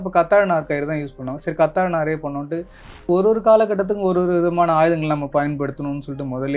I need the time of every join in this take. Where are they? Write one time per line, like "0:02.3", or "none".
0:02.8